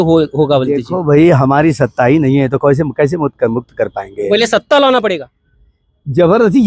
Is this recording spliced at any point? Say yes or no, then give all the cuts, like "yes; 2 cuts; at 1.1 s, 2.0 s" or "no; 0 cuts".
no; 0 cuts